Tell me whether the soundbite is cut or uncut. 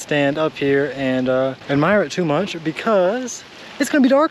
uncut